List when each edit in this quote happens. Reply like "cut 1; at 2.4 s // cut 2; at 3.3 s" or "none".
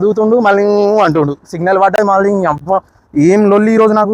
none